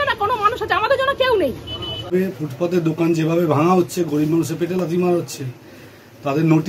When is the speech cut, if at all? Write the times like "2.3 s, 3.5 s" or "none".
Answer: 2.1 s